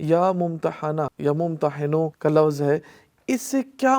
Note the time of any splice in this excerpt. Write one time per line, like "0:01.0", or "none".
0:01.1
0:02.1